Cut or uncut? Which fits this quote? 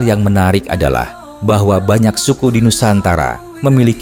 uncut